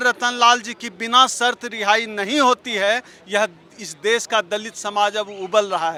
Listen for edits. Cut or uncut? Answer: uncut